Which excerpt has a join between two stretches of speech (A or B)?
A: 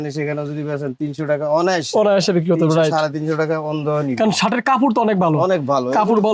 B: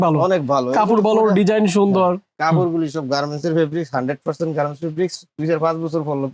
B